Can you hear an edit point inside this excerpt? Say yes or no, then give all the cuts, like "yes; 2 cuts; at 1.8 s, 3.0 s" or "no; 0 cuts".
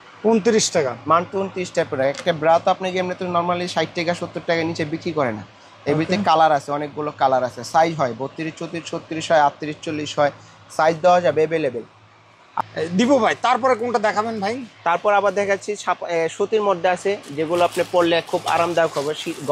no; 0 cuts